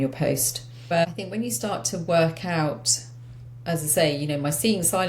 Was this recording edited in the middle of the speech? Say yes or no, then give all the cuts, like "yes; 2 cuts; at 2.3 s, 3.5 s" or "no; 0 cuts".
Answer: yes; 1 cut; at 0.9 s